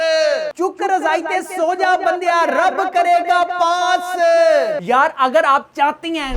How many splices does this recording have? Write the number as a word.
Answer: zero